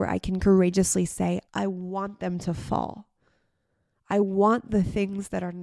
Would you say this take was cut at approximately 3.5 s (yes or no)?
no